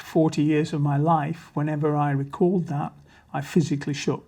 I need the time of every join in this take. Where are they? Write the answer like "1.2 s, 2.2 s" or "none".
none